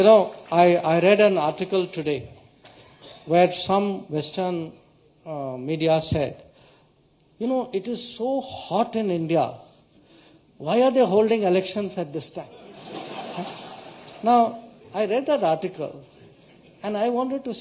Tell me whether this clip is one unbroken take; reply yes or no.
yes